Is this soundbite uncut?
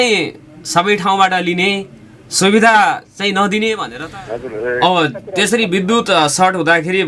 no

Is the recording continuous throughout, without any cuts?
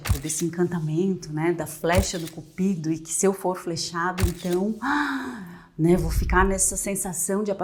yes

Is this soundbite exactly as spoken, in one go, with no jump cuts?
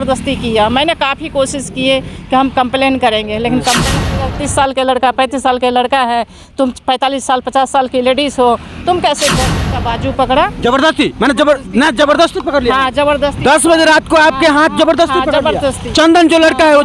no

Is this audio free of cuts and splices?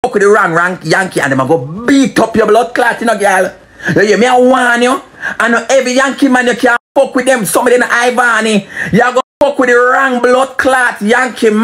yes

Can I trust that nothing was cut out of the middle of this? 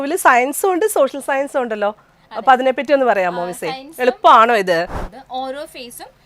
no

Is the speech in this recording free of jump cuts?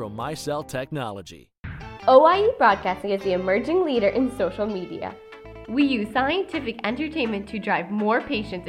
no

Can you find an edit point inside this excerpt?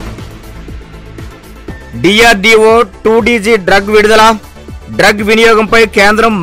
no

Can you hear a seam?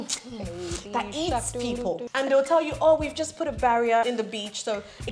yes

